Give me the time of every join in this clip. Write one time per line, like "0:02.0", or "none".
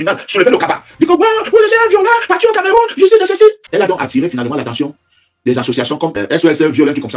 0:03.6
0:06.2